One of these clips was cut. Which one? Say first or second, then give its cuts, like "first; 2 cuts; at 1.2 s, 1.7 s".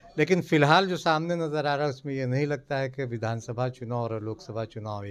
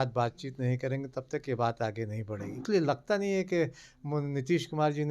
second; 1 cut; at 2.6 s